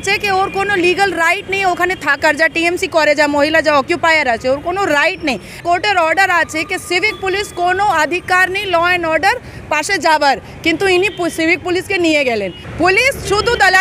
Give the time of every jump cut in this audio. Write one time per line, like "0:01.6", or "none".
0:05.5
0:12.6